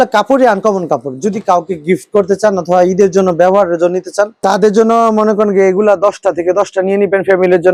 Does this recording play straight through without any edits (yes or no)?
yes